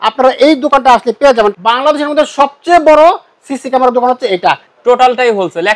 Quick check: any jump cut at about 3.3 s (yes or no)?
no